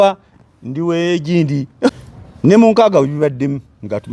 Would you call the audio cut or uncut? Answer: cut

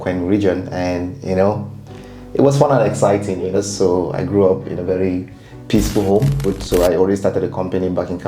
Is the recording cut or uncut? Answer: cut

